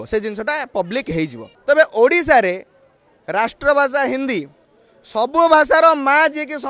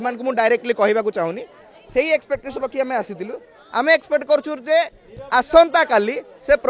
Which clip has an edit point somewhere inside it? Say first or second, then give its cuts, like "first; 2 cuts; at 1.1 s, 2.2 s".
first; 1 cut; at 1.5 s